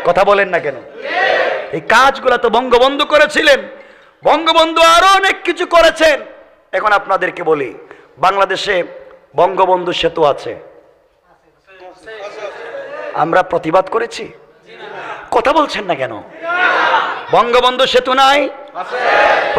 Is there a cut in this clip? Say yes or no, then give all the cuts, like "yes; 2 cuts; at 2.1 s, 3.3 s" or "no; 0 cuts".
no; 0 cuts